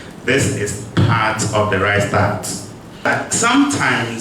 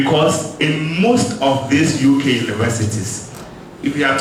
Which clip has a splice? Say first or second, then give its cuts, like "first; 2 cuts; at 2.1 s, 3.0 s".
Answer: first; 1 cut; at 3.1 s